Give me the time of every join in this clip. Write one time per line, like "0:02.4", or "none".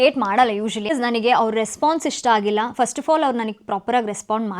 0:00.9